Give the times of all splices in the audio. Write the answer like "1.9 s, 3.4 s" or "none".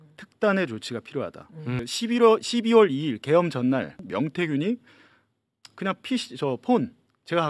1.8 s